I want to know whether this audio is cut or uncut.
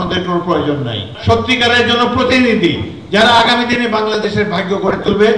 cut